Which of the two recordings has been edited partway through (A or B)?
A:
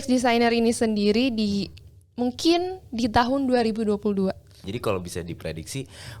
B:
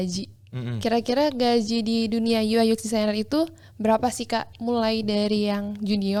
A